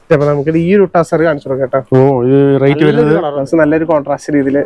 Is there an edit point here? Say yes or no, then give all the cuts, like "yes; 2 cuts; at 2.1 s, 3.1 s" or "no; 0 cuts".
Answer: yes; 1 cut; at 3.4 s